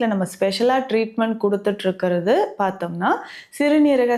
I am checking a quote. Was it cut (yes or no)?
no